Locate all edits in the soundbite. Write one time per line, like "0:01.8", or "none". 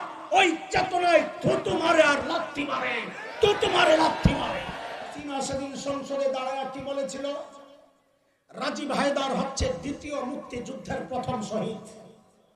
0:05.1